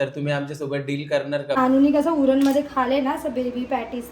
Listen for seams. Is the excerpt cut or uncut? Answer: cut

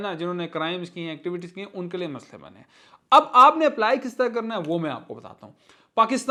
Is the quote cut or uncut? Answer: uncut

